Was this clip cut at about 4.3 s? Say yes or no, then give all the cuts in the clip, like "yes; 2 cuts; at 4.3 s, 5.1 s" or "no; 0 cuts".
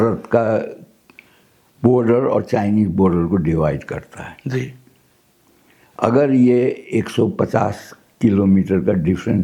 no; 0 cuts